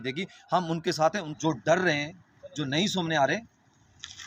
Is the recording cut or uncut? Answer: cut